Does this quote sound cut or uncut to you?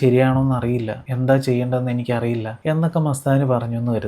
uncut